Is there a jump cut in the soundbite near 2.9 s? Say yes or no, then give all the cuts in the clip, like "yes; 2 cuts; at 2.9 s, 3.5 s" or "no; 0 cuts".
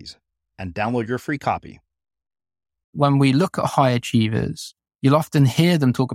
yes; 1 cut; at 2.9 s